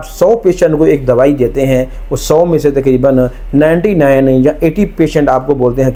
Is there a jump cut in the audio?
no; 0 cuts

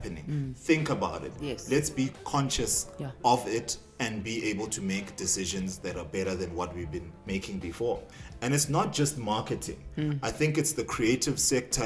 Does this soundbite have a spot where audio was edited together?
yes; 3 cuts; at 2.2 s, 7.1 s, 8.0 s

